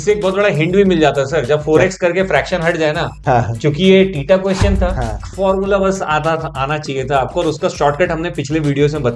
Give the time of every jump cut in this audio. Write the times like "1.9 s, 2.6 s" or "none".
5.3 s